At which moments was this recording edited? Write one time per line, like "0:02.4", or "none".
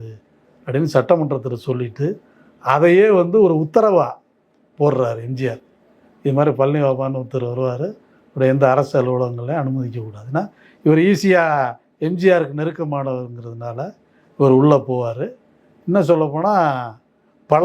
none

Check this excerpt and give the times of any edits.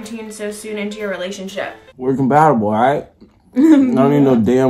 0:01.8

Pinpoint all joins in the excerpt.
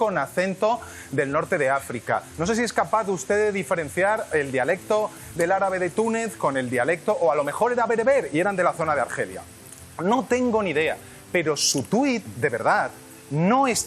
none

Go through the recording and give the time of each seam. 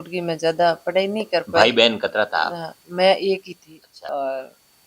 0:03.9

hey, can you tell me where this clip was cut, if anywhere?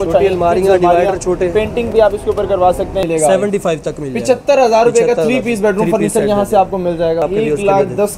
0:03.0
0:07.2

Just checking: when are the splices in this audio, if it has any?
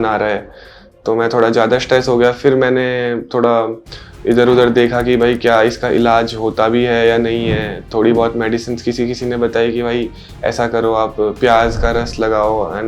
none

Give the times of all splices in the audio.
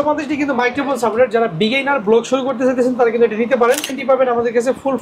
0:04.0

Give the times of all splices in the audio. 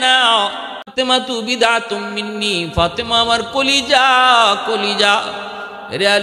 0:00.9

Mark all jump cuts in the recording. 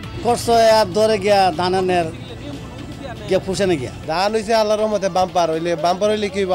none

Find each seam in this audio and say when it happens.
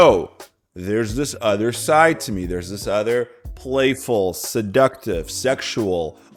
none

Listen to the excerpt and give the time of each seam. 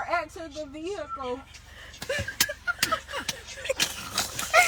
none

